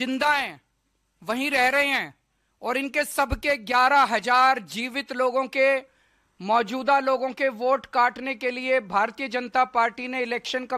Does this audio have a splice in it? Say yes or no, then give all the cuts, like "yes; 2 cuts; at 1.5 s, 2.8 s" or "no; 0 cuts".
no; 0 cuts